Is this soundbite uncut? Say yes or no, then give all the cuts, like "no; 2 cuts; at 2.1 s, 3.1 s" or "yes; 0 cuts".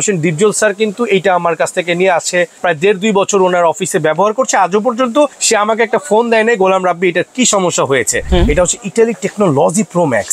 no; 3 cuts; at 2.5 s, 5.4 s, 8.2 s